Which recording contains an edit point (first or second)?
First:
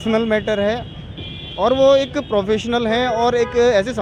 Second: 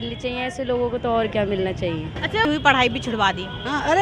second